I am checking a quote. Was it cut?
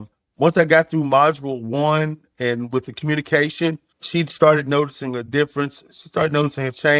no; 0 cuts

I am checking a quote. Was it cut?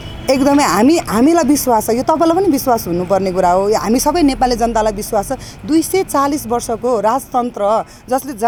no; 0 cuts

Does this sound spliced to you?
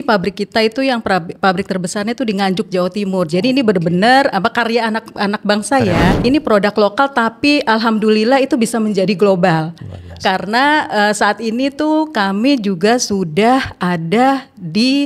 yes; 1 cut; at 6.2 s

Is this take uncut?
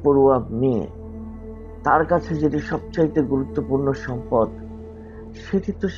yes; 0 cuts

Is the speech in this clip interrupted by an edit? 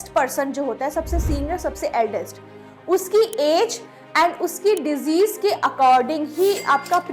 no; 0 cuts

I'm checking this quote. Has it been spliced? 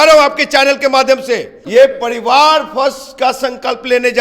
yes; 1 cut; at 1.5 s

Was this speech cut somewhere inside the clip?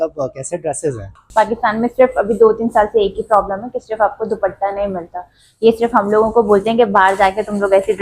yes; 1 cut; at 1.2 s

